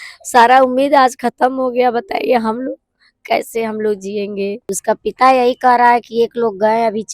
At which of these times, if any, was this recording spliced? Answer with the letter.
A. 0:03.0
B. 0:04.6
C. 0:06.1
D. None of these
B